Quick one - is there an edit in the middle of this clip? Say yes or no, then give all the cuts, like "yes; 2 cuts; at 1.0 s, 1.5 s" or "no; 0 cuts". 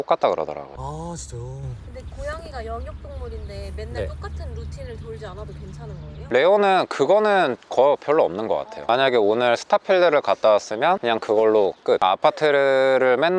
no; 0 cuts